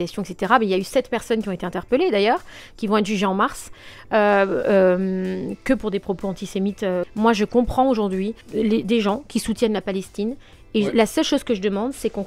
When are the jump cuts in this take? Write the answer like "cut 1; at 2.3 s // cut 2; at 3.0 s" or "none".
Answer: cut 1; at 7.0 s // cut 2; at 8.4 s